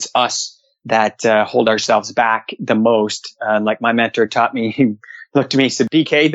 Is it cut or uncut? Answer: uncut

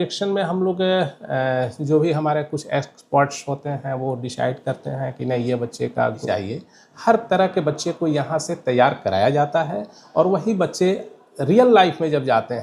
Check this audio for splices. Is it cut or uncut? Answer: cut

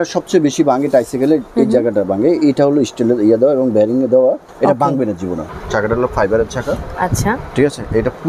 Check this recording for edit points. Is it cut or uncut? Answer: cut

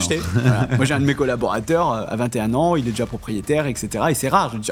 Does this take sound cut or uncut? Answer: uncut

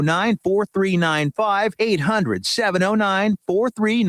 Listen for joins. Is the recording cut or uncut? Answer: cut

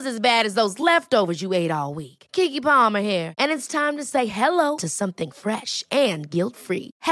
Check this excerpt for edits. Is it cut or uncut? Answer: uncut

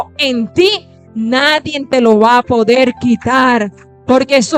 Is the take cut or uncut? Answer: uncut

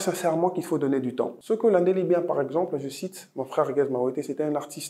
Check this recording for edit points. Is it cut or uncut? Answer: cut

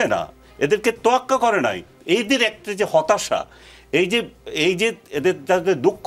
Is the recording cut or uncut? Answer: uncut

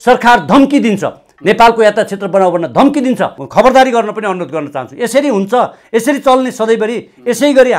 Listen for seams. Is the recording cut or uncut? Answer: cut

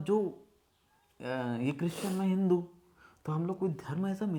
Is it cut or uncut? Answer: uncut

